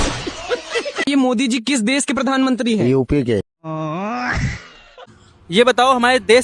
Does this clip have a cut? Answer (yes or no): yes